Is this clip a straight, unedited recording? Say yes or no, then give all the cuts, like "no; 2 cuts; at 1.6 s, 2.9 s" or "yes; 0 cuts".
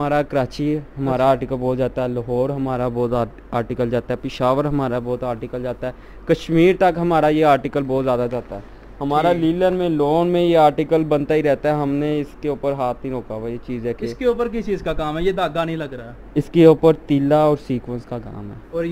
yes; 0 cuts